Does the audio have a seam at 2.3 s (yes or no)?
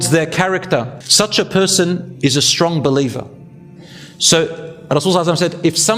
no